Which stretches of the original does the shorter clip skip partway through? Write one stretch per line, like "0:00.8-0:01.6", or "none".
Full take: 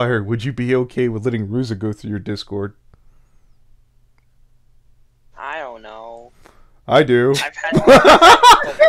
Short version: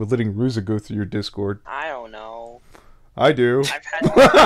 0:02.8-0:05.3